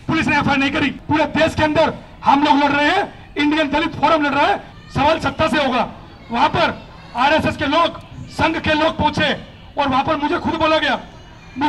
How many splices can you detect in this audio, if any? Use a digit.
2